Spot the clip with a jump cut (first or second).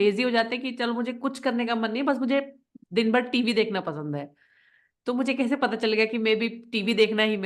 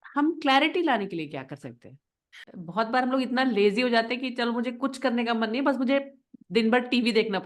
second